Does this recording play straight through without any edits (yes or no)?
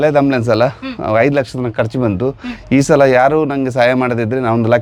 yes